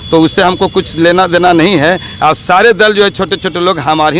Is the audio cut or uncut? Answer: uncut